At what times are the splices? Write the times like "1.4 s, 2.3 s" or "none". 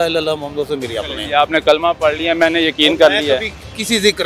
none